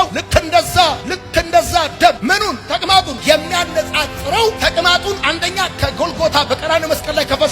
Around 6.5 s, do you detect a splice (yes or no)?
no